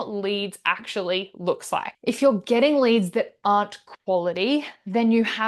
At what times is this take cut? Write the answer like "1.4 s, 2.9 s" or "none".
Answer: 1.9 s